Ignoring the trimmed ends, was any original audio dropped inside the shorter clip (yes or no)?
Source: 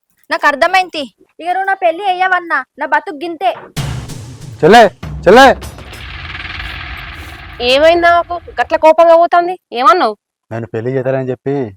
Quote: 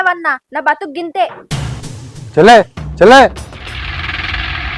no